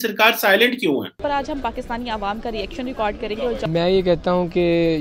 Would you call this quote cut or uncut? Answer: cut